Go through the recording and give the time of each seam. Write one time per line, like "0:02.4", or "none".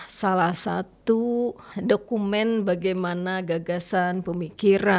0:01.7